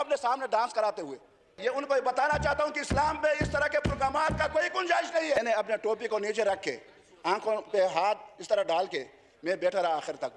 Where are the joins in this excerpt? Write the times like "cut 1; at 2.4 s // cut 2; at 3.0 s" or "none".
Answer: cut 1; at 1.6 s // cut 2; at 5.4 s